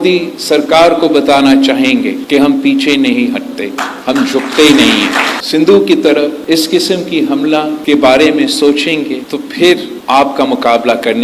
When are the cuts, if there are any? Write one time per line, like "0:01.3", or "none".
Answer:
0:05.3
0:09.9